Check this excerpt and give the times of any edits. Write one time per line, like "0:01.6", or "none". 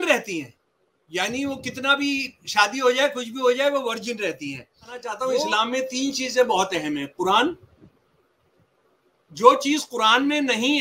0:05.3